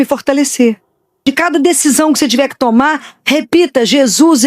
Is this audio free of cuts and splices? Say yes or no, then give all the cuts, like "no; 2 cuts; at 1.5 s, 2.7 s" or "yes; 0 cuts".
no; 1 cut; at 1.2 s